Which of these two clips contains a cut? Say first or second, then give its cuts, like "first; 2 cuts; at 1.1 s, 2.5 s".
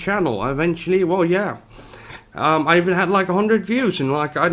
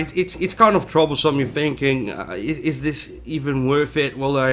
second; 1 cut; at 0.9 s